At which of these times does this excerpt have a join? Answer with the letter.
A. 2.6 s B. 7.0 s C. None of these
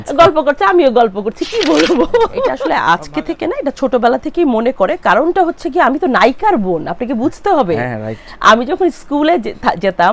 A